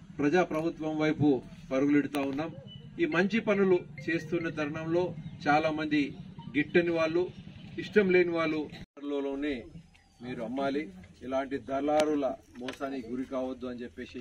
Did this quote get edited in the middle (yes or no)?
yes